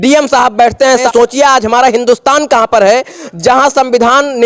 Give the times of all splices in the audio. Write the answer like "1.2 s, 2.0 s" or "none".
1.1 s